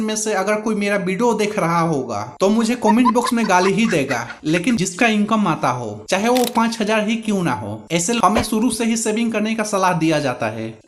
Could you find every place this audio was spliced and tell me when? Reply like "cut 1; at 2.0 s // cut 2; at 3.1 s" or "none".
cut 1; at 4.8 s // cut 2; at 8.2 s